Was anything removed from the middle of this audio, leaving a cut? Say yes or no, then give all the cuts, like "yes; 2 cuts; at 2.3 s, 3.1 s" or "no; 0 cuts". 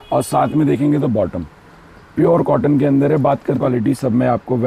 yes; 1 cut; at 3.6 s